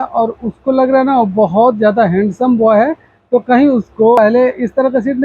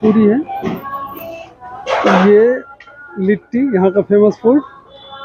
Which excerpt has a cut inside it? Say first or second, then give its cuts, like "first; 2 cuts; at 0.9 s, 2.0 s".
first; 1 cut; at 4.2 s